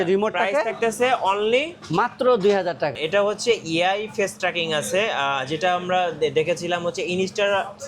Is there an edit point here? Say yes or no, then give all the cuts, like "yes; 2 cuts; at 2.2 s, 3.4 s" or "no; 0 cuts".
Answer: yes; 1 cut; at 2.9 s